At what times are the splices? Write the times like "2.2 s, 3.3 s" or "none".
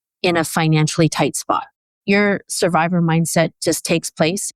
1.9 s